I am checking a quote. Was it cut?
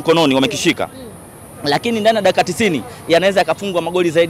no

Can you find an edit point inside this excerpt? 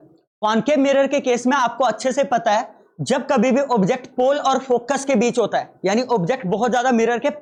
no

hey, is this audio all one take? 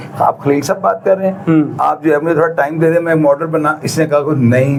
yes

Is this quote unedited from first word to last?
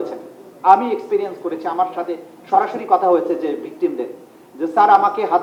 yes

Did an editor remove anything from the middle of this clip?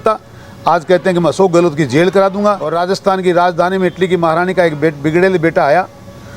yes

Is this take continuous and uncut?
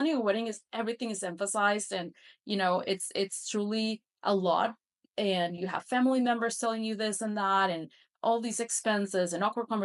yes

